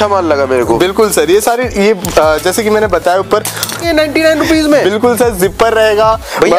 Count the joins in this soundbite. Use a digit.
1